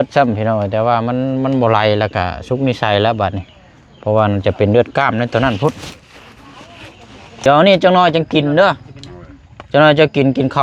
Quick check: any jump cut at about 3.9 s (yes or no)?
no